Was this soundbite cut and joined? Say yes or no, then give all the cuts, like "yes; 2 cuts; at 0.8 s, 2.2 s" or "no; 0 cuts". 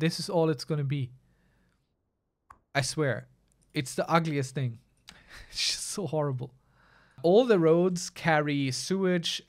yes; 1 cut; at 7.2 s